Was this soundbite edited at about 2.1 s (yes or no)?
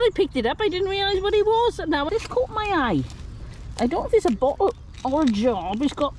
yes